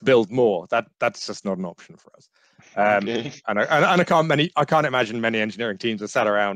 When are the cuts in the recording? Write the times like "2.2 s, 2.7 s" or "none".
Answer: none